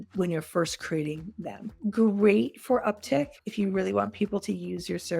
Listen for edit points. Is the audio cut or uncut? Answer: cut